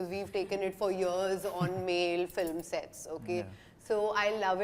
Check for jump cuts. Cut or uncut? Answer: uncut